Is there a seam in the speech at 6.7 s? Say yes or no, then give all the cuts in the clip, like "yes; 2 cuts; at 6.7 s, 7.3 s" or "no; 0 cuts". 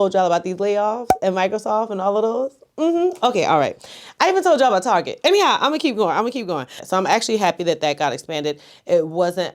yes; 1 cut; at 6.7 s